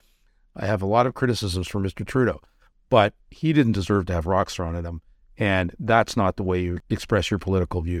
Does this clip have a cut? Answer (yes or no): yes